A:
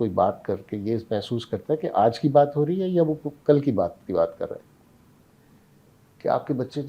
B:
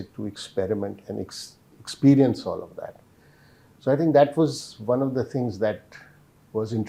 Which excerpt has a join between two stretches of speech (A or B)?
A